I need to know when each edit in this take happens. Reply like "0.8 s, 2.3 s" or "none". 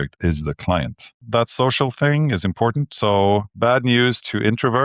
1.2 s, 3.5 s